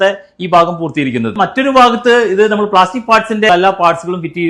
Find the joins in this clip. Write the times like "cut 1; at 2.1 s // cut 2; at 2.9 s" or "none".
cut 1; at 1.3 s // cut 2; at 3.5 s